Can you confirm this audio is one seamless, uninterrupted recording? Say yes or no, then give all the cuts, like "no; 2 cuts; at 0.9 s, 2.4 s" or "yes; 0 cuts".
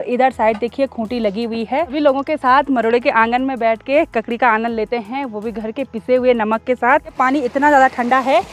no; 2 cuts; at 1.9 s, 7.2 s